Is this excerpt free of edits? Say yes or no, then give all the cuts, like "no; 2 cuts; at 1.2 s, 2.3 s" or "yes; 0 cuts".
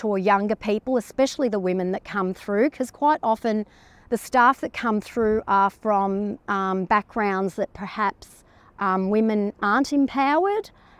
yes; 0 cuts